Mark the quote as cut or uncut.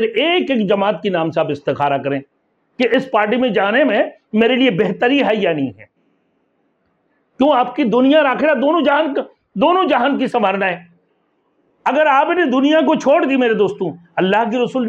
uncut